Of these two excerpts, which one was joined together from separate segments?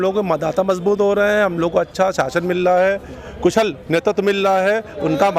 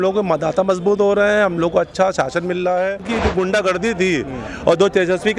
second; 1 cut; at 3.1 s

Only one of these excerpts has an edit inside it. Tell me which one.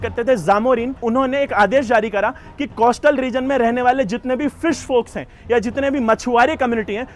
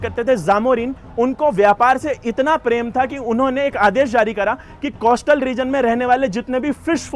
first; 1 cut; at 1.0 s

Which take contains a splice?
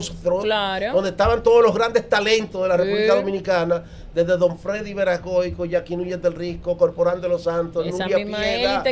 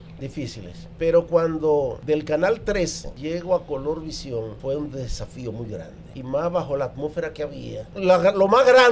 second; 6 cuts; at 0.8 s, 2.0 s, 3.1 s, 4.6 s, 6.0 s, 7.9 s

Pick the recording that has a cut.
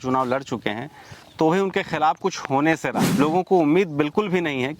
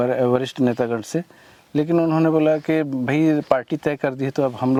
first; 1 cut; at 3.0 s

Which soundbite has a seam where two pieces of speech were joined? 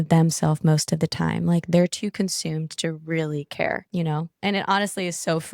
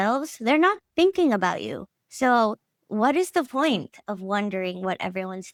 first; 1 cut; at 3.8 s

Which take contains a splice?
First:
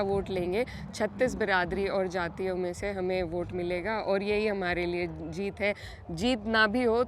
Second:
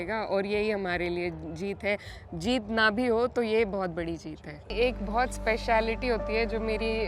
second; 1 cut; at 4.7 s

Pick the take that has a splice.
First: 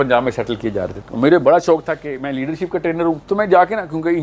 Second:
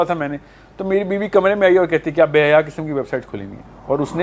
first; 2 cuts; at 1.0 s, 3.2 s

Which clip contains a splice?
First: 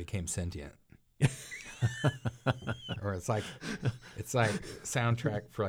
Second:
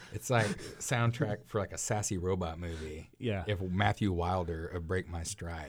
first; 1 cut; at 2.9 s

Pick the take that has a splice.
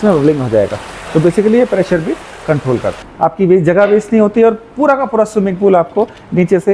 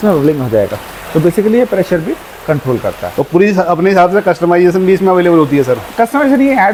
first; 1 cut; at 3.0 s

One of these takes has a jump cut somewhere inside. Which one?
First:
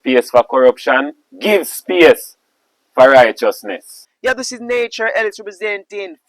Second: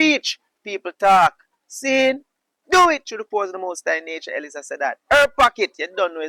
first; 1 cut; at 4.0 s

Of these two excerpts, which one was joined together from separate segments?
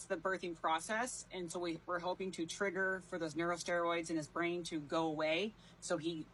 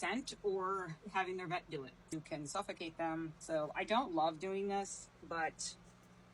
second; 3 cuts; at 2.1 s, 3.4 s, 5.1 s

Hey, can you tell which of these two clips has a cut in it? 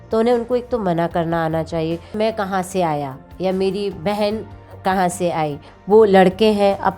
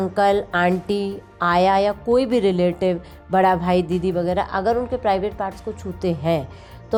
first; 2 cuts; at 2.1 s, 5.7 s

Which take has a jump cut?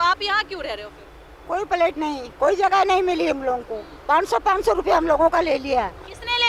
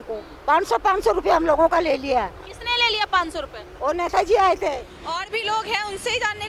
second; 1 cut; at 4.9 s

